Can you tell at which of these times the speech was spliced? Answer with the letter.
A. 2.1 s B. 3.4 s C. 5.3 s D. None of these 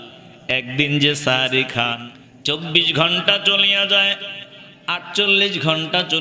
A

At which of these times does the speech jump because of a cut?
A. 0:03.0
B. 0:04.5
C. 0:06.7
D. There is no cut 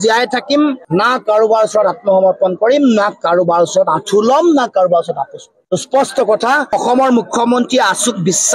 C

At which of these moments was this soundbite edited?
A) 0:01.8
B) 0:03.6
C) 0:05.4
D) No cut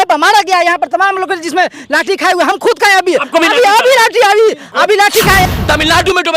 C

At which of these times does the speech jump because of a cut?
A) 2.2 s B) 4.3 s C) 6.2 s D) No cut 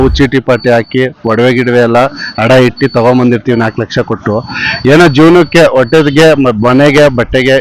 D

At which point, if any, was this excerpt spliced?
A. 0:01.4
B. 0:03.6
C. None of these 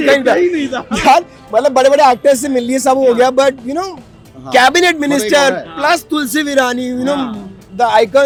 C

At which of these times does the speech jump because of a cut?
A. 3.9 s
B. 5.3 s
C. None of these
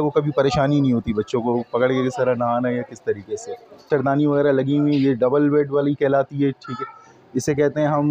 A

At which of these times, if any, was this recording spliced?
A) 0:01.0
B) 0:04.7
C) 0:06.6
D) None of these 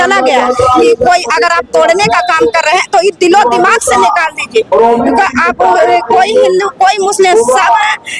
D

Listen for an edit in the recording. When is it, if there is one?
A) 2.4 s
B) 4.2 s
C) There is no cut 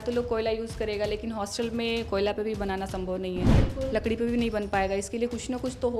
C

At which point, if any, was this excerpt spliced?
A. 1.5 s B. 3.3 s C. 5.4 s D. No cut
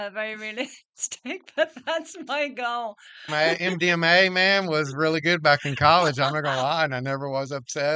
B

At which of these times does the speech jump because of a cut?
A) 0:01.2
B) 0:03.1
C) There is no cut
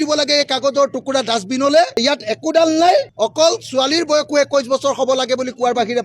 B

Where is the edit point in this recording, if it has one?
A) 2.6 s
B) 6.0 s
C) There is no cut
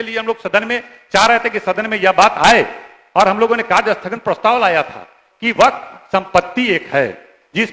C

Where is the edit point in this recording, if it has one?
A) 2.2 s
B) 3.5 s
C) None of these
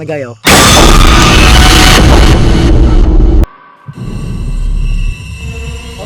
B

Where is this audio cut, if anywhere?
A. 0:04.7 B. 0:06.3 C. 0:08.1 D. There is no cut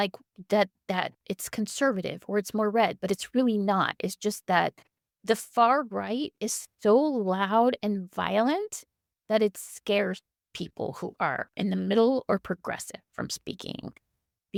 D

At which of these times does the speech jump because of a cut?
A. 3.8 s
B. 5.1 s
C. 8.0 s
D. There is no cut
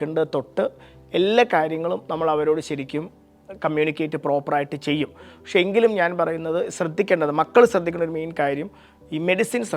D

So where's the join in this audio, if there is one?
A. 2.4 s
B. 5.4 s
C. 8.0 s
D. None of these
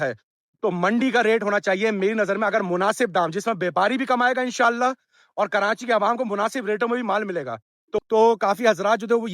C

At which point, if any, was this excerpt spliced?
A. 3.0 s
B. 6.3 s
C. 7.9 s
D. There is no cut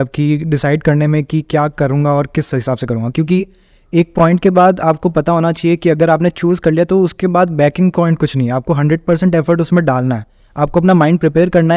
D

